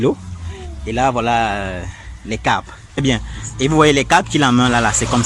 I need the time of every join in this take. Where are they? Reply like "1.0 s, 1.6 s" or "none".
3.0 s